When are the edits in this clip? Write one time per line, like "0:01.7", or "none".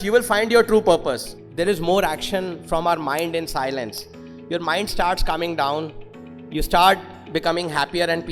0:01.3